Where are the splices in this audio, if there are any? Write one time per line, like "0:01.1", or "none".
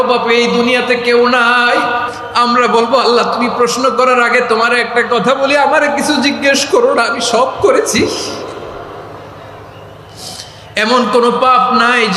0:02.2